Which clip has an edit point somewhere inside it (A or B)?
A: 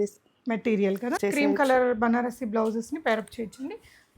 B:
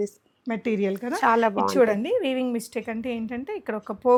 A